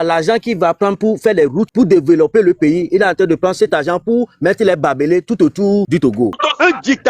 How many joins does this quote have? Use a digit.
2